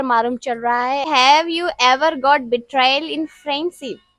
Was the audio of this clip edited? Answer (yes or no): yes